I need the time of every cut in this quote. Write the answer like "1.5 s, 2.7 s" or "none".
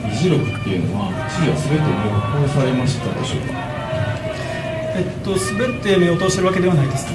none